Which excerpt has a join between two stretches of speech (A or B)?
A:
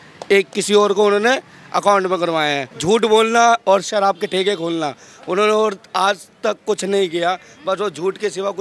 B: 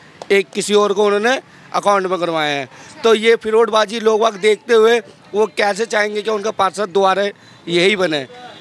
A